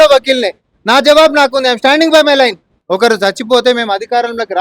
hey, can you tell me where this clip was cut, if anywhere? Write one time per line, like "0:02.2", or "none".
0:02.7